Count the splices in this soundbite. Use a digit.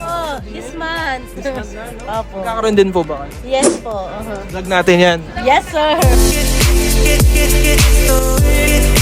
1